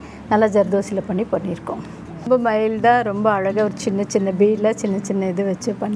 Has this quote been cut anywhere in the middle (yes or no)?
yes